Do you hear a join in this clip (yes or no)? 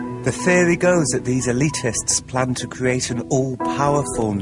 yes